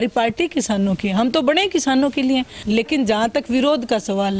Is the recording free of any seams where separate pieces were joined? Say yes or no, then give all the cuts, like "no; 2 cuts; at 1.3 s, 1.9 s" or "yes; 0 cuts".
no; 1 cut; at 2.5 s